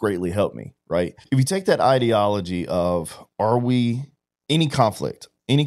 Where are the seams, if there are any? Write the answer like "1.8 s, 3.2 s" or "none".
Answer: 1.2 s